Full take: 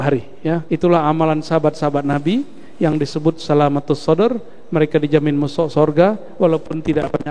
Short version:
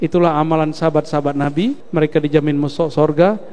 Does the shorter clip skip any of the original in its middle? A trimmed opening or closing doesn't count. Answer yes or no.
yes